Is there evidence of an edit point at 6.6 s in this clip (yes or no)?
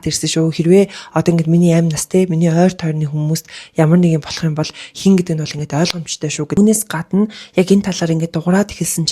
yes